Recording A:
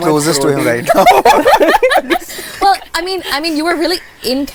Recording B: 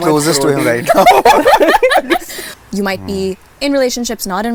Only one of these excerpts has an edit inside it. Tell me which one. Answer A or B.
B